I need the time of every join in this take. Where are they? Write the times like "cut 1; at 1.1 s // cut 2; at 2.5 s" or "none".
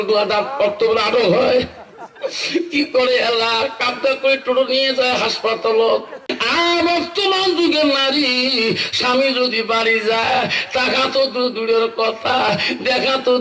cut 1; at 6.2 s